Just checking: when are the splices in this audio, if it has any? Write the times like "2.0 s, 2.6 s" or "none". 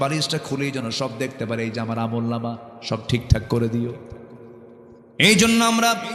5.0 s